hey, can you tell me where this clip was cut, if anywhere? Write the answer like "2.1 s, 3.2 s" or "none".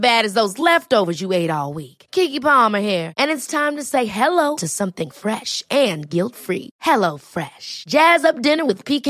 none